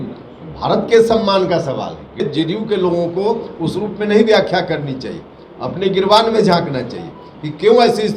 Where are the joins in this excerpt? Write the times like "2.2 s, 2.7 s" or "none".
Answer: 2.2 s